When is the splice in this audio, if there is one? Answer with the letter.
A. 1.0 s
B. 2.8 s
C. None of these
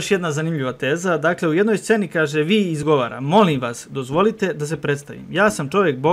B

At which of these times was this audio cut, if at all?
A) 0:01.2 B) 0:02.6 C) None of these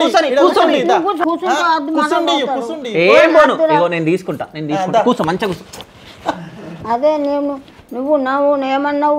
A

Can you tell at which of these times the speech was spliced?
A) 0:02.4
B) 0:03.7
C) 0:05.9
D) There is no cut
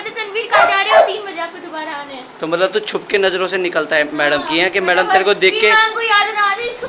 D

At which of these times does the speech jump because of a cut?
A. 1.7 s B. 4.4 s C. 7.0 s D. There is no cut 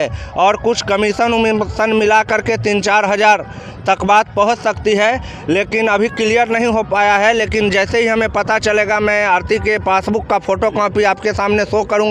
D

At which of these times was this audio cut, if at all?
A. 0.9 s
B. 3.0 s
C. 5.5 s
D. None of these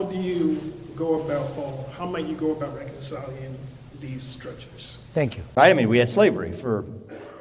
C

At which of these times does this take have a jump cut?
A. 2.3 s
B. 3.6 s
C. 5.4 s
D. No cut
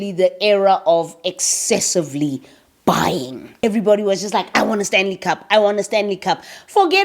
B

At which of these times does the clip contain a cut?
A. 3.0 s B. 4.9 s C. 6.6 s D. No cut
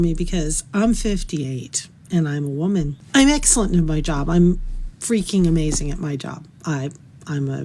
D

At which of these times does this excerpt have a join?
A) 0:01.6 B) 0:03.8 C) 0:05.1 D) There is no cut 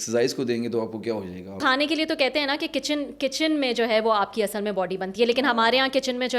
A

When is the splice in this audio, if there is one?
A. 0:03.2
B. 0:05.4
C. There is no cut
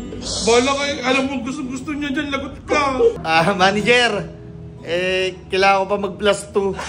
A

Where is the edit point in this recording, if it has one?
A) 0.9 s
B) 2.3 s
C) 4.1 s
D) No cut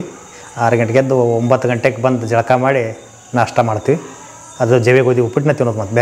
D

